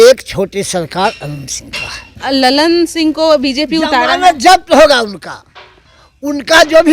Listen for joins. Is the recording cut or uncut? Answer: cut